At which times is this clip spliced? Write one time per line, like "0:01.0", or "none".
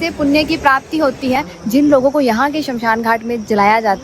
0:01.3